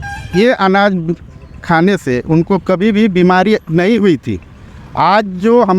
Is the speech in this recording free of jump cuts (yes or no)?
yes